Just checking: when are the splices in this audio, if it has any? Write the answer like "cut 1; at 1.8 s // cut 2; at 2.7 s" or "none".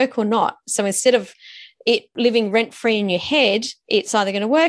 cut 1; at 2.1 s // cut 2; at 3.7 s

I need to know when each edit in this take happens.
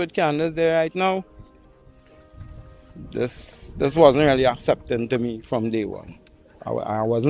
none

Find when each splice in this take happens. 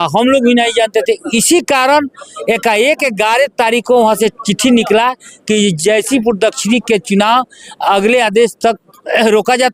none

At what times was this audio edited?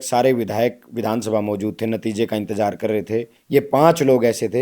cut 1; at 3.3 s

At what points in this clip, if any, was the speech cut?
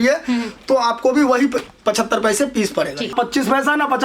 cut 1; at 3.1 s

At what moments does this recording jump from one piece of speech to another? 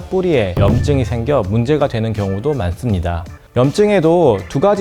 none

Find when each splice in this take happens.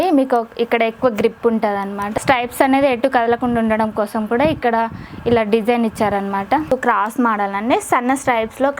cut 1; at 2.1 s // cut 2; at 6.7 s

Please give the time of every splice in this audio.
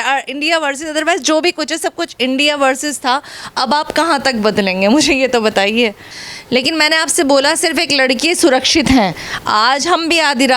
cut 1; at 6.1 s

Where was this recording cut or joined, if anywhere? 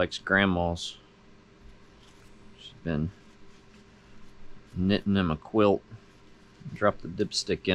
cut 1; at 2.2 s

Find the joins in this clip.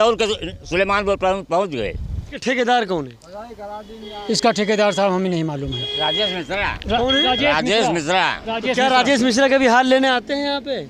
cut 1; at 2.3 s

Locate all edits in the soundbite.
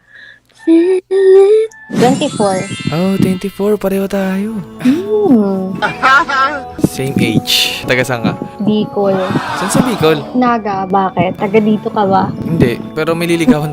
cut 1; at 1.8 s

